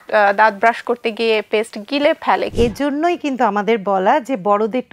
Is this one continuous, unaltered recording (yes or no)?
no